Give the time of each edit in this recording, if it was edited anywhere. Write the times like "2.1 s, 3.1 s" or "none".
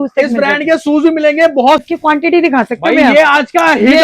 1.8 s